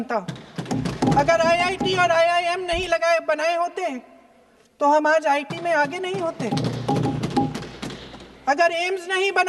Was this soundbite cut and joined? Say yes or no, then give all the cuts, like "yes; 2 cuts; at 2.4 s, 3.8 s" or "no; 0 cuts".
no; 0 cuts